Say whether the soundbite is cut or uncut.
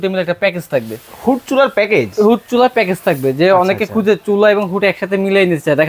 uncut